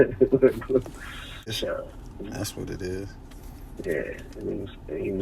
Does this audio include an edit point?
yes; 1 cut; at 1.5 s

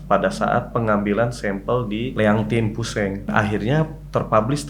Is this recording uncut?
no; 2 cuts; at 2.1 s, 3.3 s

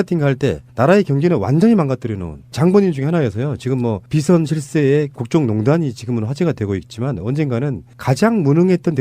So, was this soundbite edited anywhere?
yes; 1 cut; at 1.8 s

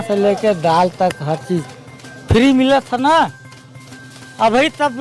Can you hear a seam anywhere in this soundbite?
no; 0 cuts

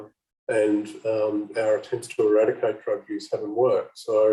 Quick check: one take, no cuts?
yes; 0 cuts

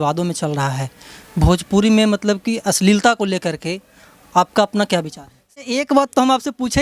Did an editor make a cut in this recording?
yes; 1 cut; at 5.6 s

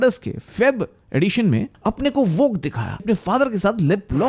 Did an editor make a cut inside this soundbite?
yes; 2 cuts; at 1.7 s, 3.0 s

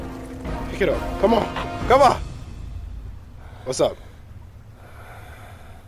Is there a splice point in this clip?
no; 0 cuts

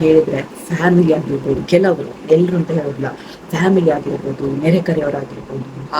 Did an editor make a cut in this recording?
no; 0 cuts

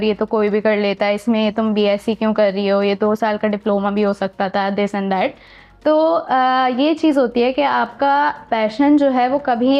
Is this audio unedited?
yes; 0 cuts

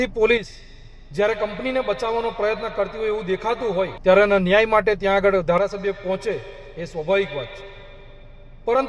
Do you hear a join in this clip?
yes; 1 cut; at 3.9 s

